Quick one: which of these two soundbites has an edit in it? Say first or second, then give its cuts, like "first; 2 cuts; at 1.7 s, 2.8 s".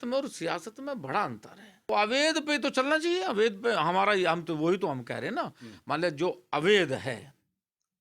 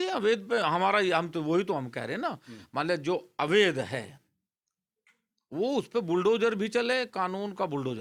first; 1 cut; at 1.9 s